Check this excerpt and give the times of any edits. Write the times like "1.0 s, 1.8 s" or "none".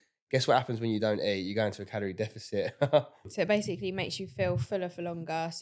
3.2 s